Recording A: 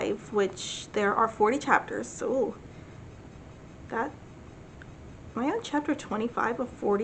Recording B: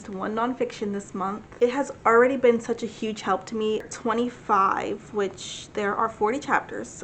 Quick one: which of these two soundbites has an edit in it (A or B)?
B